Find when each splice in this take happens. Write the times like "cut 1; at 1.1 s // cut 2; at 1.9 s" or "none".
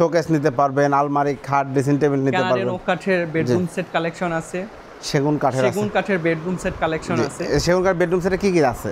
none